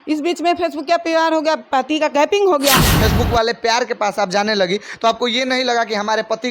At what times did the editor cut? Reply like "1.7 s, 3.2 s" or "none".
3.0 s